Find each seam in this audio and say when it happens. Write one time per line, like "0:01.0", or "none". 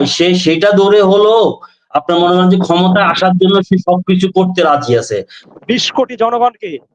0:05.4